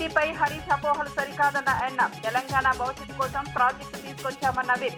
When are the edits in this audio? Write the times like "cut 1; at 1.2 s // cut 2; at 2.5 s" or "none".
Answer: none